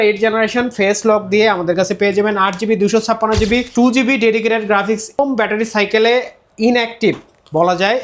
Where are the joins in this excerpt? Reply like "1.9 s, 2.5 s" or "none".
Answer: 3.7 s, 5.2 s